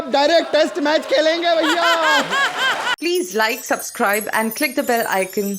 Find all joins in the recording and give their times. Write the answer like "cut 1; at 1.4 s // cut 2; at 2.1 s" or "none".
cut 1; at 2.9 s